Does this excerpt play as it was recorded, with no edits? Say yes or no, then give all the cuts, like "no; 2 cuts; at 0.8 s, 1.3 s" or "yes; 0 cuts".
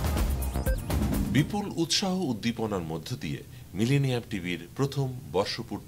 no; 1 cut; at 1.3 s